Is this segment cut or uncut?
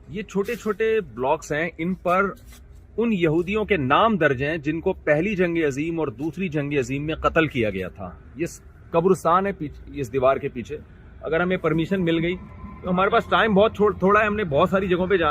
uncut